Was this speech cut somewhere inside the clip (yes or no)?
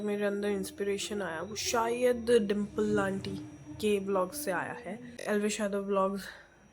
yes